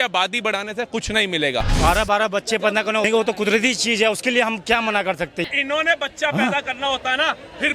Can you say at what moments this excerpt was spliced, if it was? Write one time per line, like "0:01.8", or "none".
0:01.7
0:03.1
0:05.4

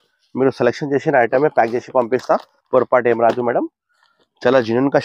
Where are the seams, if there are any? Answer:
none

